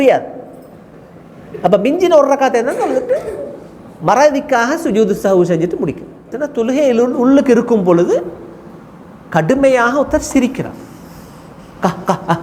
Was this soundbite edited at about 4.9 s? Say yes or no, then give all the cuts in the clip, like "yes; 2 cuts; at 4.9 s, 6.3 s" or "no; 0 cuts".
no; 1 cut; at 6.4 s